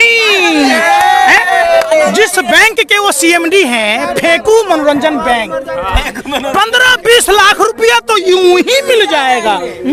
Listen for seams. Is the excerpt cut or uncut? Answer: uncut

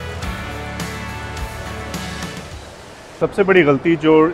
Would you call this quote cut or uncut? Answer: cut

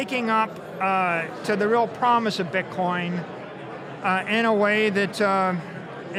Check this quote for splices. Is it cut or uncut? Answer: uncut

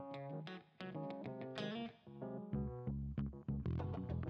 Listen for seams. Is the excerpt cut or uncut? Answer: uncut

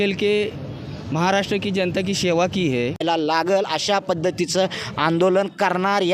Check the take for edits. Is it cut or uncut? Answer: cut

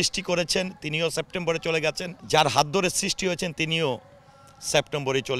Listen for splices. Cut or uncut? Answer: cut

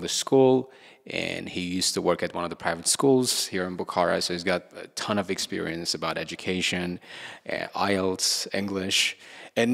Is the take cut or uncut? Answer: uncut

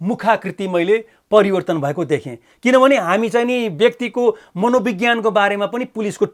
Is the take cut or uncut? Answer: uncut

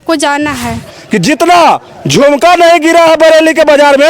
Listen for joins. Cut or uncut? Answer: cut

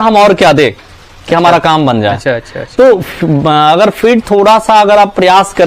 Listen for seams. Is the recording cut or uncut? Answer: uncut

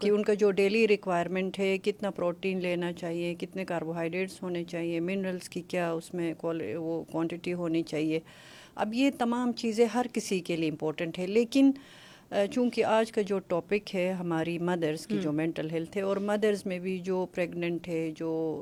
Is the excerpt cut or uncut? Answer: uncut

